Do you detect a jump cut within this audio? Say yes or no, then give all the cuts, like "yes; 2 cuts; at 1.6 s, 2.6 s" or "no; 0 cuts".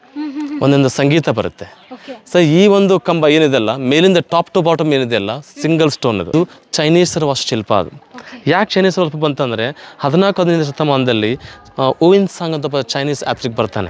yes; 1 cut; at 6.3 s